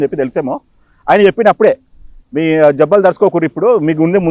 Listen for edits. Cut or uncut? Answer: uncut